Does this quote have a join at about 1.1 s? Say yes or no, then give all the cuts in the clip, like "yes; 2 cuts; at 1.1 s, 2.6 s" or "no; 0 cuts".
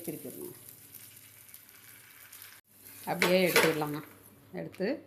no; 1 cut; at 2.6 s